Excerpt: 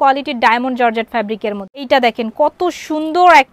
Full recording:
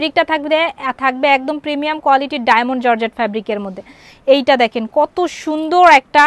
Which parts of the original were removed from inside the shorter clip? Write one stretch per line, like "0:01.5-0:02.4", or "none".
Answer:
0:03.9-0:04.4